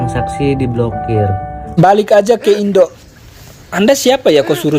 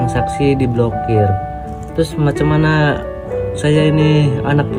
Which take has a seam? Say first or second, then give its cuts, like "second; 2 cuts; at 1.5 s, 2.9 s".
first; 1 cut; at 1.8 s